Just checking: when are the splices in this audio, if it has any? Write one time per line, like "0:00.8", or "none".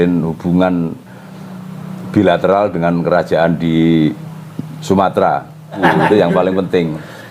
0:05.8